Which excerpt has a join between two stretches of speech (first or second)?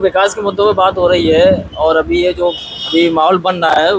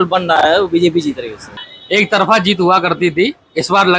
second